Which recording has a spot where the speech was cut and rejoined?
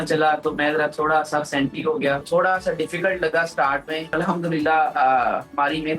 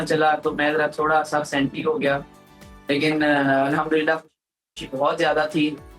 first; 2 cuts; at 2.2 s, 4.1 s

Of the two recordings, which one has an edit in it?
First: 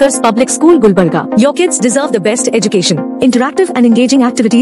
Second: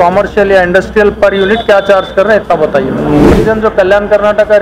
second; 1 cut; at 3.3 s

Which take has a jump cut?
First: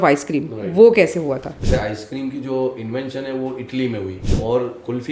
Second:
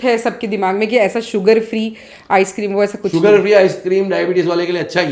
first; 2 cuts; at 1.6 s, 4.2 s

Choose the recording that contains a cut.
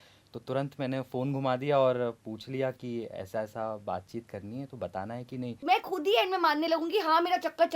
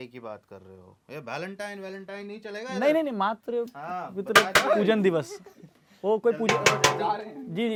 first; 1 cut; at 5.6 s

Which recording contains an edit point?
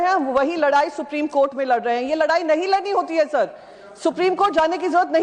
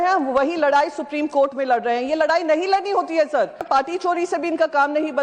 second; 1 cut; at 3.7 s

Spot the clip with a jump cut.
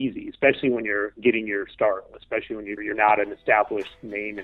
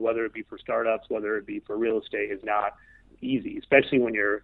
first; 1 cut; at 2.8 s

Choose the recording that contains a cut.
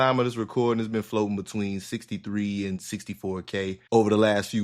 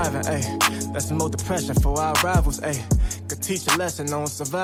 first; 1 cut; at 3.7 s

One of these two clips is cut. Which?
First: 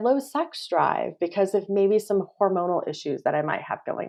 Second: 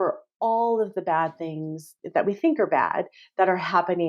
second; 1 cut; at 1.9 s

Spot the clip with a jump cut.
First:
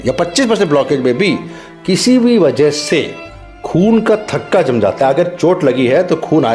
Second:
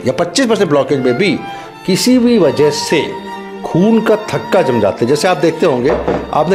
first; 1 cut; at 5.0 s

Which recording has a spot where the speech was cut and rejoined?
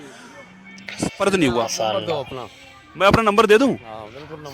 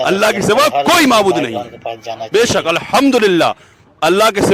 first; 1 cut; at 1.0 s

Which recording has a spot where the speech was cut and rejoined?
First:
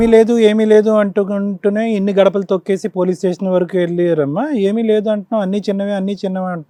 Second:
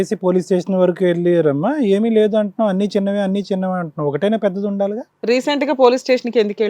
second; 1 cut; at 5.1 s

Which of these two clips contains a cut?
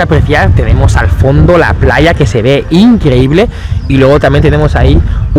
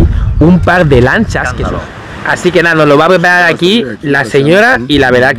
second; 1 cut; at 1.4 s

